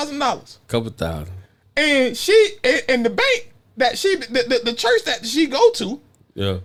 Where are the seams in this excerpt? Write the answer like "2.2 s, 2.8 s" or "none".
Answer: none